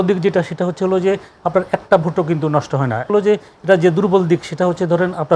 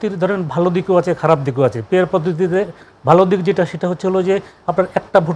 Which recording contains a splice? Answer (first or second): first